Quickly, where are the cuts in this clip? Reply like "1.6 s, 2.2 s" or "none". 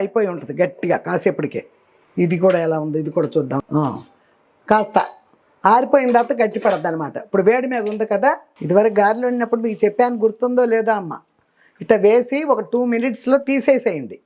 8.5 s